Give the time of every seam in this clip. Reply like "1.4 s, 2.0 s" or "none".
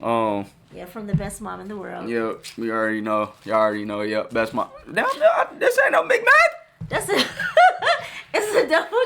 none